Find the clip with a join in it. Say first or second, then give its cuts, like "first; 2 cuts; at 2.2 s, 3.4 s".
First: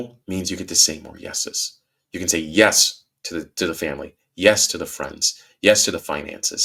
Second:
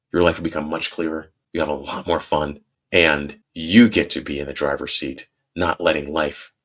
second; 2 cuts; at 1.3 s, 2.9 s